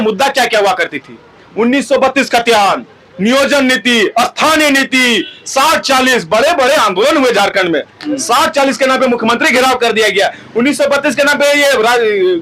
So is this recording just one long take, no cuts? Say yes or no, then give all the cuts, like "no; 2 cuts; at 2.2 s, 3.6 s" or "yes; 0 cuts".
yes; 0 cuts